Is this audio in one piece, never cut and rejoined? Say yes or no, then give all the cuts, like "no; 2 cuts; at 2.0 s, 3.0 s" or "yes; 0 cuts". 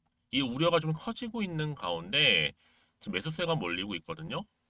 yes; 0 cuts